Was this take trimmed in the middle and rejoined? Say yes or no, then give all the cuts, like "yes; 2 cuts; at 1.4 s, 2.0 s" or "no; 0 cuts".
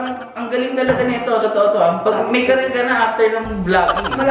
no; 0 cuts